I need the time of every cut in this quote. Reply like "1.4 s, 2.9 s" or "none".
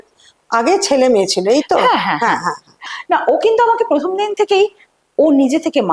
2.9 s